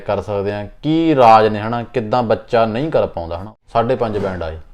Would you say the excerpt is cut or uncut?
cut